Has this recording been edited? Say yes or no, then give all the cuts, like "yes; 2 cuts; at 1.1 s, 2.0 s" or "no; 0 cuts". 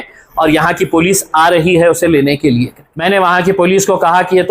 yes; 1 cut; at 2.9 s